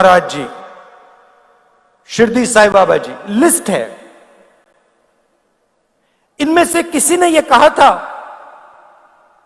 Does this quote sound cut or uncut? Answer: uncut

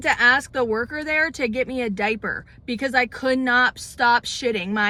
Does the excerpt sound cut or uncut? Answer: uncut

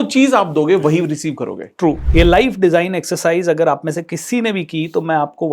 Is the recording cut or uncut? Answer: cut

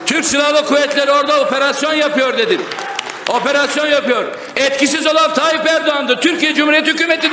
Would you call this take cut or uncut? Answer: uncut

